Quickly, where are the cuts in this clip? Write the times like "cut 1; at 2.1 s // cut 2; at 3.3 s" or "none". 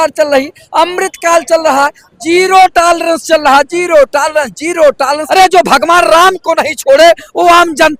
cut 1; at 5.2 s